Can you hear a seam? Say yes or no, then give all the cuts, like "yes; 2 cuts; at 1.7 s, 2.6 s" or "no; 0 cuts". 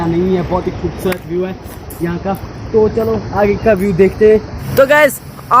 yes; 1 cut; at 4.6 s